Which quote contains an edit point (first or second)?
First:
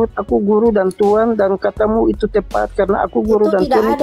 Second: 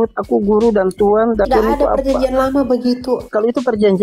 second